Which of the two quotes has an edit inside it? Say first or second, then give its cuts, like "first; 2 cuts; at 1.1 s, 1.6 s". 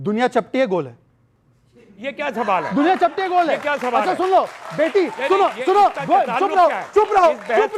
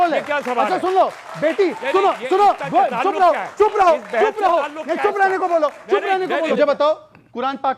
second; 1 cut; at 6.5 s